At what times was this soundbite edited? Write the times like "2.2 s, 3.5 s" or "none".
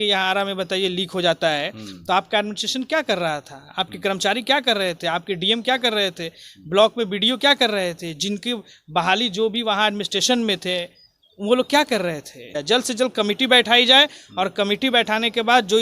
12.5 s